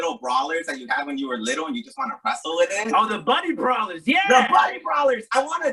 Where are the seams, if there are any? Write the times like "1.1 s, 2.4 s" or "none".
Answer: none